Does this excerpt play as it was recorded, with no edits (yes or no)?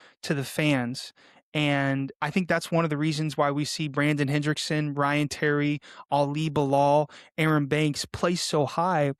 yes